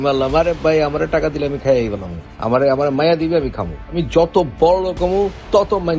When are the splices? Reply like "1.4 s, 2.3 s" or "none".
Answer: none